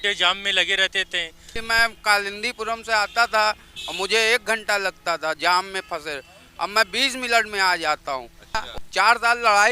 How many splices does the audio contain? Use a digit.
2